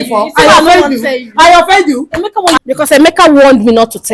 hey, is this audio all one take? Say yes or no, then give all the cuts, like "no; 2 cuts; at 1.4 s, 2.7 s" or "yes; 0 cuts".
no; 1 cut; at 2.6 s